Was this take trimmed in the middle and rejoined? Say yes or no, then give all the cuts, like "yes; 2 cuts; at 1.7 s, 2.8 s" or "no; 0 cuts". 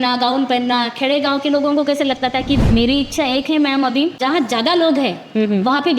yes; 2 cuts; at 2.6 s, 4.2 s